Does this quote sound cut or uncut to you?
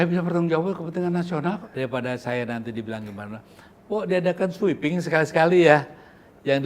cut